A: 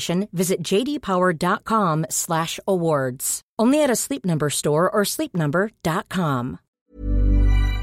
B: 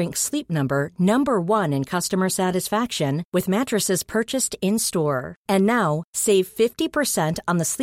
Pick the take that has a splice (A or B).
A